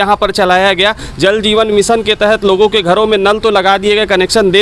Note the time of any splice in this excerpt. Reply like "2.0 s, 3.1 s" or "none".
none